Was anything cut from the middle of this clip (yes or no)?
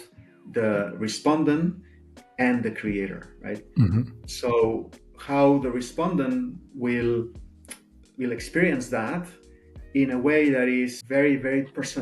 yes